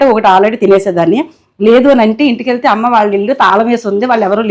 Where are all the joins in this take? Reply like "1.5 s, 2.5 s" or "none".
none